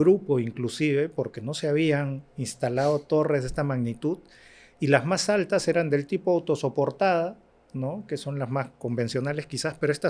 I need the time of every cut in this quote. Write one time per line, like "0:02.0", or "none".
none

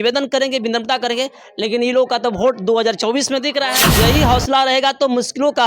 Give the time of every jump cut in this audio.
0:03.8

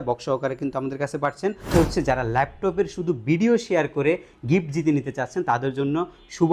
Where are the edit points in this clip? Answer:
0:01.7

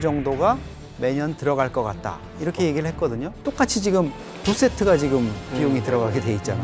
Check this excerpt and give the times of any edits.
0:03.3

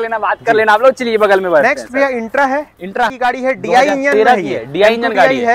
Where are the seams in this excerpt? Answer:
0:03.0

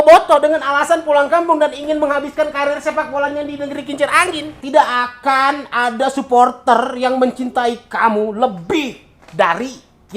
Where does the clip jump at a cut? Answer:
0:04.6

